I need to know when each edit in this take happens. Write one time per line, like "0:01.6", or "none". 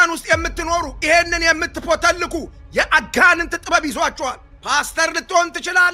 none